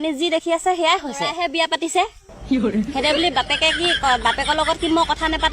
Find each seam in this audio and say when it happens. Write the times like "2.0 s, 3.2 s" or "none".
1.3 s